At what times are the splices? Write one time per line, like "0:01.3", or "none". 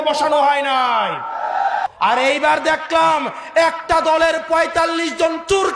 0:01.8